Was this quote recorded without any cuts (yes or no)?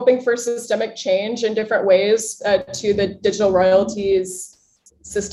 yes